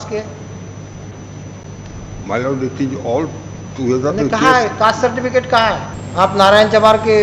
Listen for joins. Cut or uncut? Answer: cut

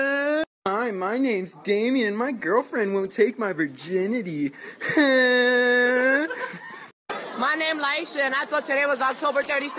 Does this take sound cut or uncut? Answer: cut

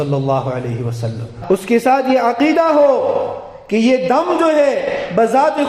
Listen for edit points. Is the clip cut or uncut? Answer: cut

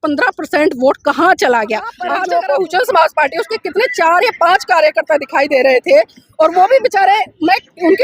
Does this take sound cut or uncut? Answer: cut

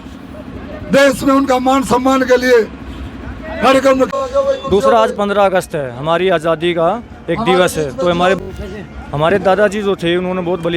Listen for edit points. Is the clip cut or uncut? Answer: cut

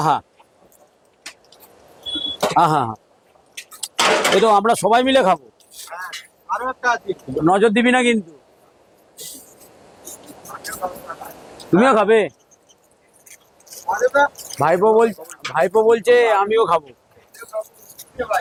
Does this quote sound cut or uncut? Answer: uncut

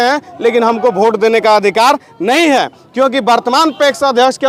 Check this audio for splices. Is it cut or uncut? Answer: uncut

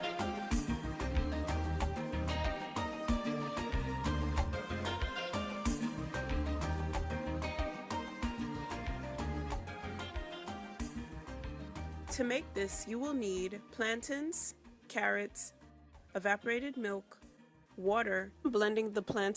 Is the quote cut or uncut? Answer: uncut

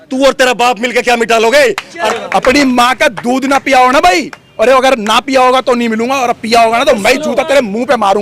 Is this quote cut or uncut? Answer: uncut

